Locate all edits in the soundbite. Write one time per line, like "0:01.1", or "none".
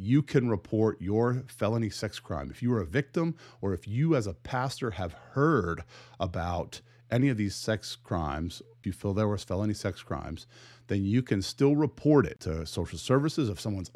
0:08.7
0:12.4